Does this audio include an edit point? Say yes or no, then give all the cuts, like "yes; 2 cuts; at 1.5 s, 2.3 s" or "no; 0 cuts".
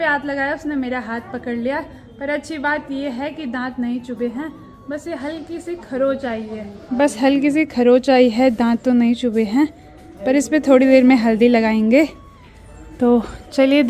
no; 0 cuts